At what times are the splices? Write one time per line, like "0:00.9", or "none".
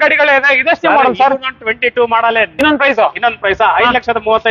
0:02.5